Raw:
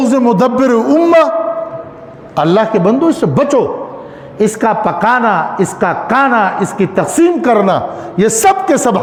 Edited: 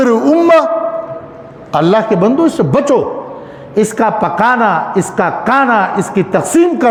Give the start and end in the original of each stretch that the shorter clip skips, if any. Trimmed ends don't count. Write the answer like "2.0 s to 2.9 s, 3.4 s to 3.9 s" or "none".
none